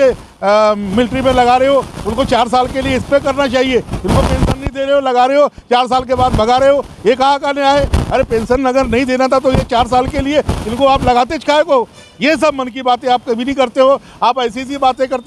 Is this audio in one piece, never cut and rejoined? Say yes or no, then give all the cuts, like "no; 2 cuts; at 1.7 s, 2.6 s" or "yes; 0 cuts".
yes; 0 cuts